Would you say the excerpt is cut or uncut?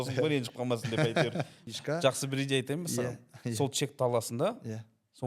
cut